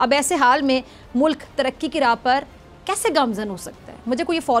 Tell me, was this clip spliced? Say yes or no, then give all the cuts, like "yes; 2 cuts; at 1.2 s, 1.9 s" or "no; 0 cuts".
no; 0 cuts